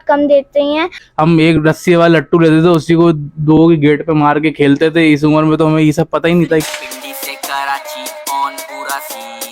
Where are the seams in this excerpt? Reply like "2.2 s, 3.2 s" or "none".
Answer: 0.9 s, 6.6 s